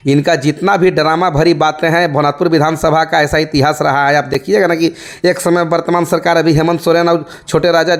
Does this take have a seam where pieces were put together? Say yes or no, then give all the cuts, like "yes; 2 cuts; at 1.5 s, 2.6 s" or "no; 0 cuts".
no; 0 cuts